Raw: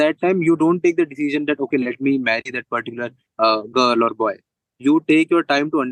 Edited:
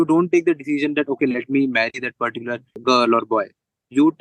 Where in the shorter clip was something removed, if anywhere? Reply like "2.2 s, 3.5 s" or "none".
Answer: 2.8 s